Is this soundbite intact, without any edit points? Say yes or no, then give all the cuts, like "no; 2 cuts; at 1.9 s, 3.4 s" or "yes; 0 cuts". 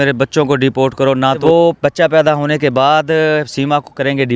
no; 1 cut; at 1.4 s